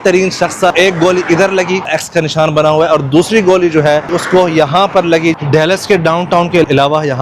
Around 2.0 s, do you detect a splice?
yes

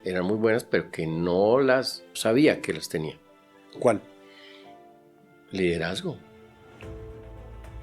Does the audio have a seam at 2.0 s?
yes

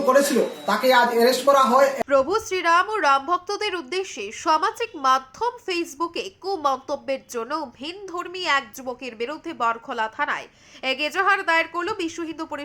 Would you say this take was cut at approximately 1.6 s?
yes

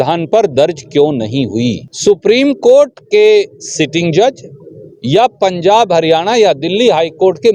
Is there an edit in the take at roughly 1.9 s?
yes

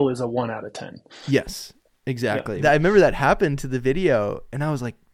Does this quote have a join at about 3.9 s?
no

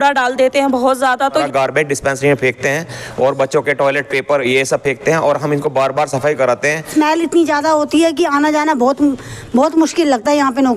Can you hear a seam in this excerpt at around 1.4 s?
yes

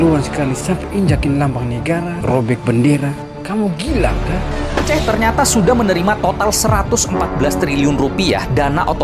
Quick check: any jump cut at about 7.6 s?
no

